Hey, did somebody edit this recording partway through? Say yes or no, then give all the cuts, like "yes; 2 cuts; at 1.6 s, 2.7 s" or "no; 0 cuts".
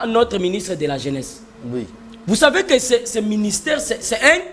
no; 0 cuts